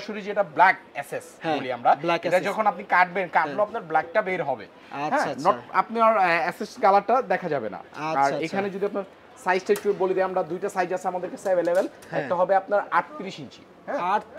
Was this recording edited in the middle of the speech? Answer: no; 0 cuts

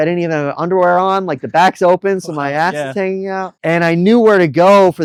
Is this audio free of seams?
yes; 0 cuts

